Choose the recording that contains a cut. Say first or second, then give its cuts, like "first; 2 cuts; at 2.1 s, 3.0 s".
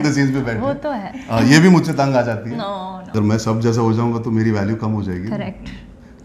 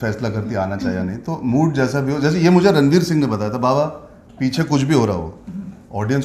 first; 1 cut; at 3.0 s